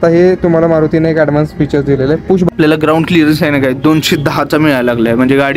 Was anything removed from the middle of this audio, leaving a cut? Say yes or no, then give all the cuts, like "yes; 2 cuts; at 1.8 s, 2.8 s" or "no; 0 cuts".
yes; 1 cut; at 2.5 s